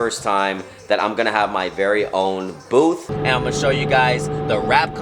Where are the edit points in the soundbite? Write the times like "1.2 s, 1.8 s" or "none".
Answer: 3.1 s